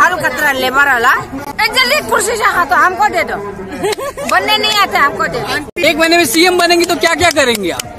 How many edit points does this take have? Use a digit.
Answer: 2